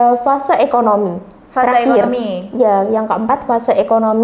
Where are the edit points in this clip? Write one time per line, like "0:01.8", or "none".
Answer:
none

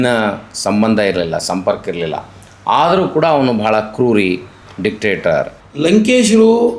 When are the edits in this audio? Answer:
0:05.6

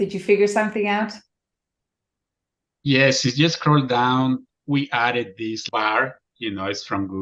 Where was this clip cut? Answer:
0:05.6

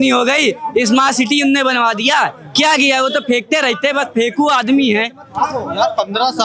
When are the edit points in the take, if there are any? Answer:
none

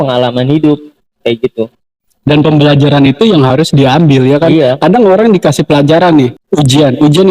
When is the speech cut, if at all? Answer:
0:06.4

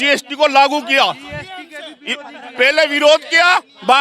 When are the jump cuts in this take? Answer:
none

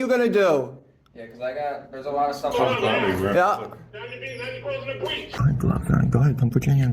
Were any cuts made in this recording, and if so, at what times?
0:05.3

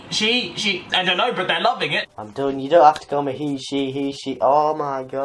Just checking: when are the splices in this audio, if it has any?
none

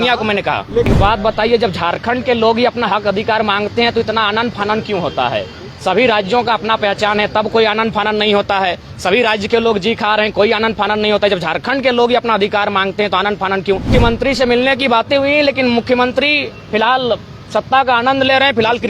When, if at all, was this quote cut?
0:00.9
0:13.9

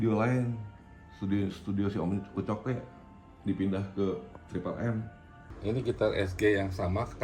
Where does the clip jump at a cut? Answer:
0:05.5

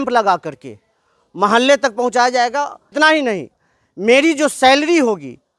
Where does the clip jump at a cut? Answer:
0:02.9

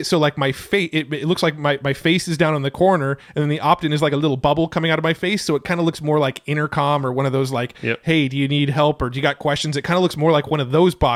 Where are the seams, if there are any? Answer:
none

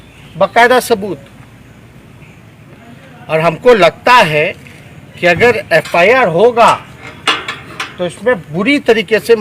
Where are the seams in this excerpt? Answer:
none

